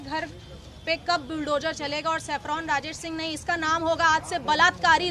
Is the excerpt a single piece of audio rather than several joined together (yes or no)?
yes